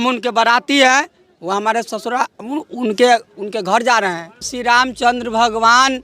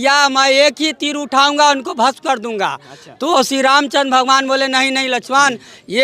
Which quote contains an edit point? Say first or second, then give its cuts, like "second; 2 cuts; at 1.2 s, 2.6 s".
first; 1 cut; at 4.5 s